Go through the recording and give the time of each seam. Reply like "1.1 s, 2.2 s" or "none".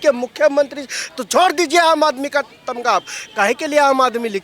none